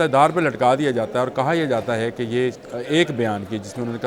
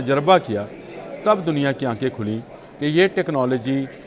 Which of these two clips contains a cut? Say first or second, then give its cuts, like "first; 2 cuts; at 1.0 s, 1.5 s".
first; 1 cut; at 2.6 s